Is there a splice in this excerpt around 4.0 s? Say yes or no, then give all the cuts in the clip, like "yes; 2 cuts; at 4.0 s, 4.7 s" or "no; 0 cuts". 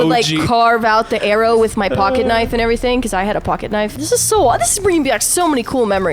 yes; 1 cut; at 4.0 s